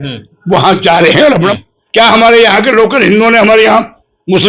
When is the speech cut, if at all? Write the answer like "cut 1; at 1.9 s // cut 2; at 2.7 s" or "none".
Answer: cut 1; at 1.5 s